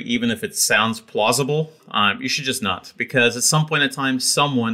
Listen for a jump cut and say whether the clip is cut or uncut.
uncut